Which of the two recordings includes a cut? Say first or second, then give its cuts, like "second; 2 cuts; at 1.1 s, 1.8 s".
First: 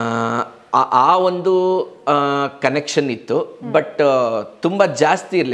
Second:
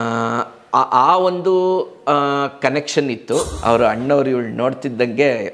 second; 1 cut; at 3.5 s